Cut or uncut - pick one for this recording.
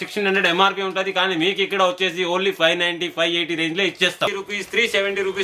cut